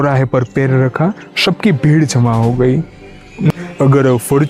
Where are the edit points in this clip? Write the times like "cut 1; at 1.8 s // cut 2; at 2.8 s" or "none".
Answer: cut 1; at 3.5 s